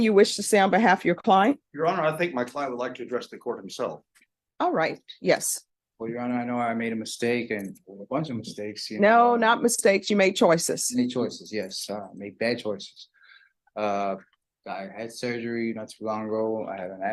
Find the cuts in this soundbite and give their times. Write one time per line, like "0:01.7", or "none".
none